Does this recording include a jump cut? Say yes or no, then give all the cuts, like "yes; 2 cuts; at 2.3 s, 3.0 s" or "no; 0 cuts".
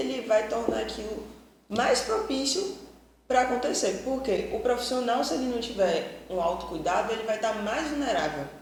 no; 0 cuts